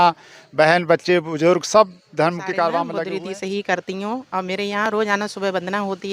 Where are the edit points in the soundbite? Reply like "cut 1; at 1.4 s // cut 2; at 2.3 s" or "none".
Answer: cut 1; at 2.9 s